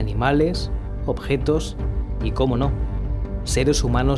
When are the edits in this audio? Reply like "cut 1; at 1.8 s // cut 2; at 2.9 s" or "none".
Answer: cut 1; at 1.1 s